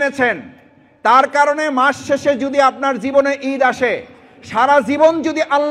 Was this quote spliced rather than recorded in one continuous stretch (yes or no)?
no